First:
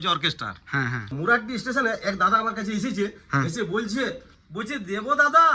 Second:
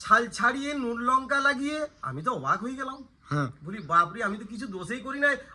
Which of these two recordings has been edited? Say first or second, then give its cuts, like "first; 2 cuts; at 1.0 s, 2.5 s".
first; 2 cuts; at 1.0 s, 4.4 s